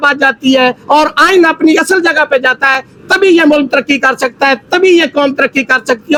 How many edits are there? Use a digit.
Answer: 0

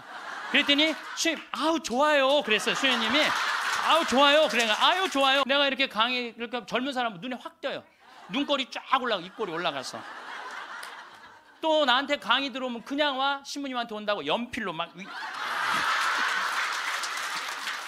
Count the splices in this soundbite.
1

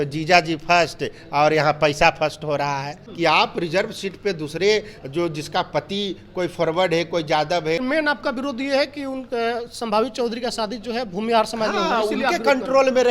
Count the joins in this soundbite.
2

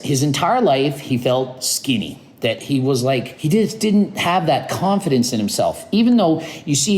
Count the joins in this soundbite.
1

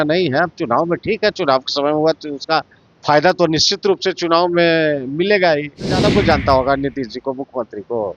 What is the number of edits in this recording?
1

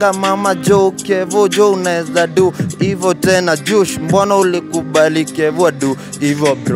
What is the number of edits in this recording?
0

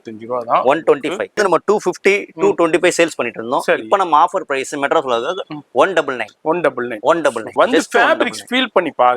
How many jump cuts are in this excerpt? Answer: 2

